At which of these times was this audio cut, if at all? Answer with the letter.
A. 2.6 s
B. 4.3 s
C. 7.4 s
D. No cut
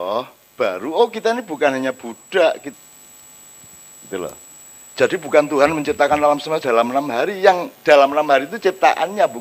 A